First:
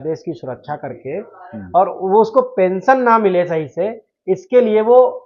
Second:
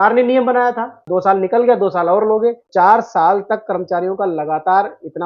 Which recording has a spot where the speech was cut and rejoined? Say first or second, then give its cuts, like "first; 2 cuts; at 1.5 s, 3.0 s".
second; 2 cuts; at 1.0 s, 2.6 s